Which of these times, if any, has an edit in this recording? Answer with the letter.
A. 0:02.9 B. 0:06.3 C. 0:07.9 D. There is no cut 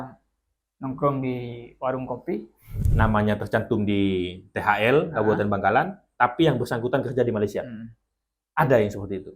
A